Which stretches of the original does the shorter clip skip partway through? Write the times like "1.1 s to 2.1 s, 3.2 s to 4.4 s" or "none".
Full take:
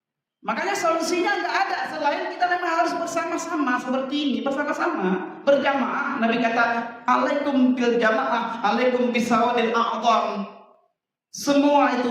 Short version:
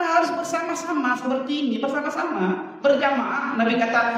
none